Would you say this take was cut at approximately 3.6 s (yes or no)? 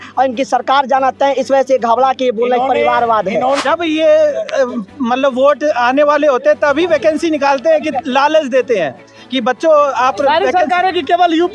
yes